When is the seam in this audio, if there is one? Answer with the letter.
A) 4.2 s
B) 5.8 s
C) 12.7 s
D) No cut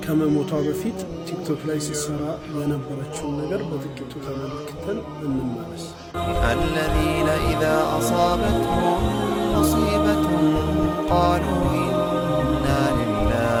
D